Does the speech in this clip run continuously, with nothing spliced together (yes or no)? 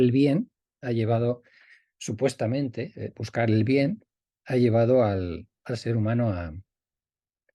yes